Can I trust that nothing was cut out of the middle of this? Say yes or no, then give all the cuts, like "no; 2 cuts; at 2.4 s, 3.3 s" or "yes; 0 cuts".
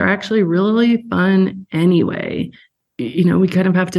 no; 1 cut; at 2.7 s